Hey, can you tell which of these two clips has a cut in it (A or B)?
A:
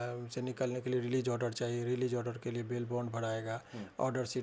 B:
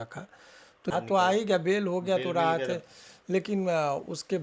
B